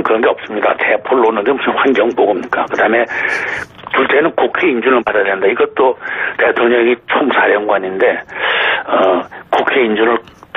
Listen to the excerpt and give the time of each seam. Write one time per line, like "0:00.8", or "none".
0:01.6